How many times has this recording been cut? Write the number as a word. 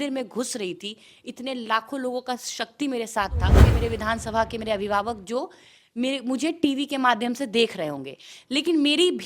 one